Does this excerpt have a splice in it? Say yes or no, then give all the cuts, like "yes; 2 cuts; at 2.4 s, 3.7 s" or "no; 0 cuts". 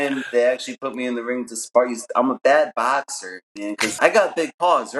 yes; 1 cut; at 3.9 s